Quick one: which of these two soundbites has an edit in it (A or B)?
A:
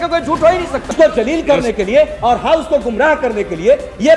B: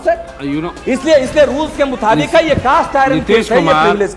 A